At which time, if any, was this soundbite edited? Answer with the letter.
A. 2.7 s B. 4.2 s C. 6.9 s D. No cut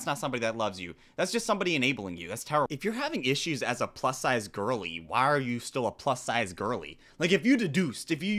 A